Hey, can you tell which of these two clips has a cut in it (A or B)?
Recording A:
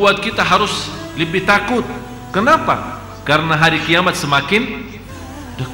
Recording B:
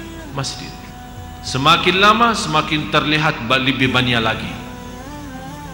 B